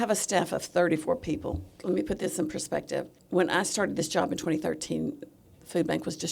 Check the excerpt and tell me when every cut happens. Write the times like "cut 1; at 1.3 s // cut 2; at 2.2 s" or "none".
cut 1; at 1.7 s // cut 2; at 3.2 s